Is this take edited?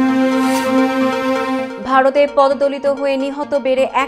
no; 0 cuts

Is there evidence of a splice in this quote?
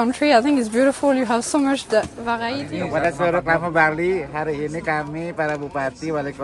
yes; 1 cut; at 2.7 s

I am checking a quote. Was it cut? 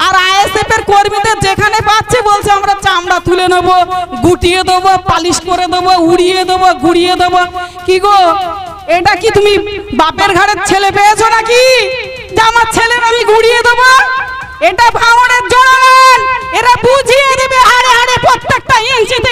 no; 0 cuts

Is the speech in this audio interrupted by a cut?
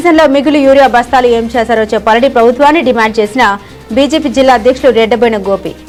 no; 0 cuts

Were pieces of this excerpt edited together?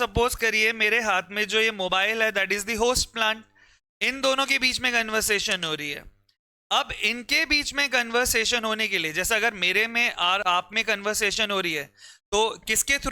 no; 0 cuts

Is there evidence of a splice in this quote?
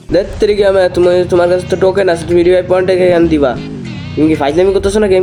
no; 0 cuts

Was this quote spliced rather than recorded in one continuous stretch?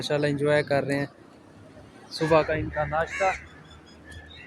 no; 0 cuts

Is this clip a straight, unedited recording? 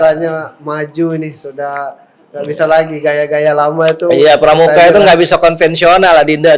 yes; 0 cuts

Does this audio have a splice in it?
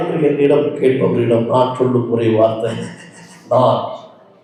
no; 0 cuts

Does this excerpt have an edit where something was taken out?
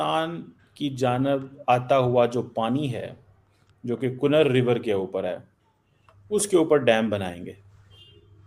no; 0 cuts

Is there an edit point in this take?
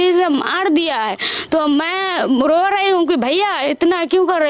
no; 0 cuts

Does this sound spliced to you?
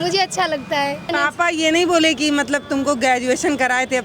yes; 1 cut; at 1.1 s

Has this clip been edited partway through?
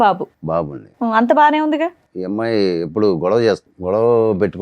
yes; 2 cuts; at 2.1 s, 3.7 s

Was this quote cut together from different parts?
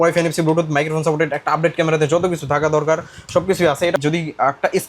yes; 1 cut; at 4.0 s

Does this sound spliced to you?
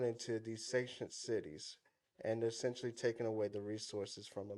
no; 0 cuts

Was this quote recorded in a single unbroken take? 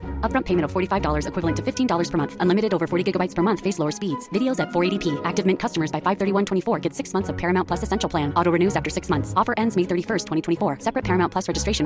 yes; 0 cuts

